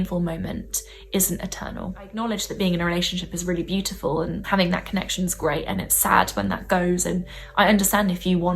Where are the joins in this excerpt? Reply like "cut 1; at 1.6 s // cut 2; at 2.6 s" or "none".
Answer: cut 1; at 2.1 s // cut 2; at 4.4 s